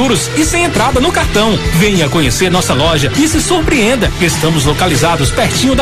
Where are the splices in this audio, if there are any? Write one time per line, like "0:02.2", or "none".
none